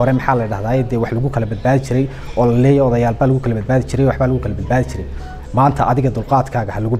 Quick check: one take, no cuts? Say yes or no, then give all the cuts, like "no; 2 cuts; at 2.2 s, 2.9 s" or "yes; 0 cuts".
yes; 0 cuts